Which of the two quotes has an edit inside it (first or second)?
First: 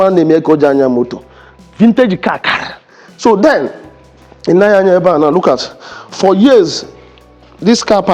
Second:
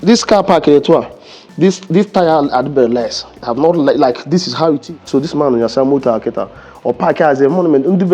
second